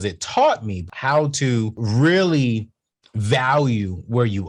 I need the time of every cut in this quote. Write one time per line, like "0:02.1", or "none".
0:00.9
0:01.8